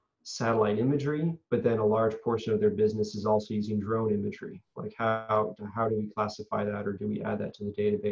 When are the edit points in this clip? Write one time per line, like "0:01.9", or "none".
none